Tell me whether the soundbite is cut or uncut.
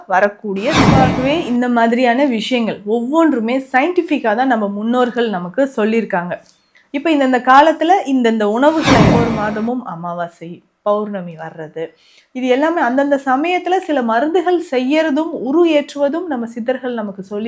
cut